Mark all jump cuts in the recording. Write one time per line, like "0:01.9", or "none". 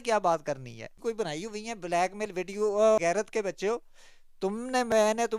0:00.9
0:03.0

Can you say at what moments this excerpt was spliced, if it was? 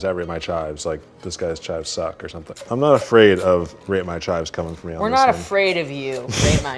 0:02.4

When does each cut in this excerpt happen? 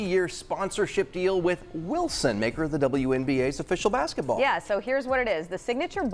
none

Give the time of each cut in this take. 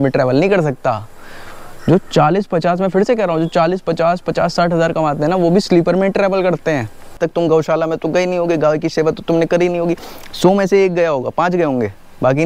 0:07.2

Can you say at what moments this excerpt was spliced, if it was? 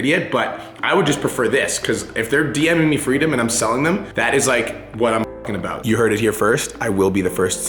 0:05.8

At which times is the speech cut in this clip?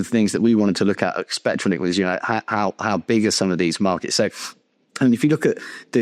none

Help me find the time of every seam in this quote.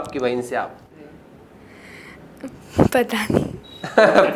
none

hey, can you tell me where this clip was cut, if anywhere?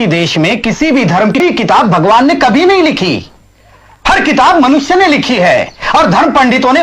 0:01.4

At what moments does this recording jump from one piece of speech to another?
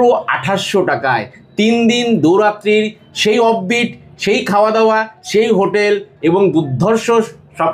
none

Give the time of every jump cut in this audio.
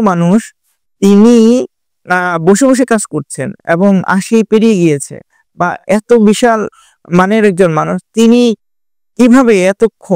none

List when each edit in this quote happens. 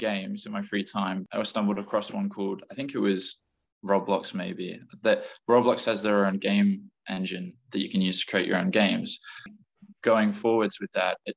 0:09.6

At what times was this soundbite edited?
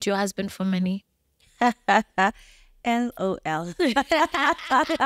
none

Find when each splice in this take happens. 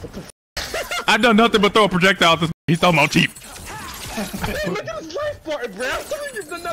0:01.0

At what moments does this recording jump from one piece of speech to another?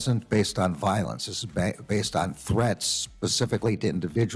none

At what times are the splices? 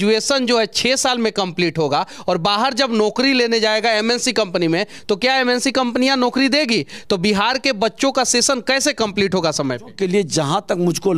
0:09.9

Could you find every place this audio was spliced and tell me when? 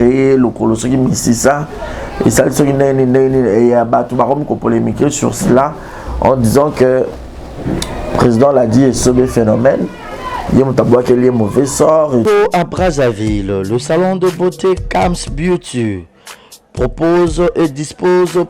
0:12.2

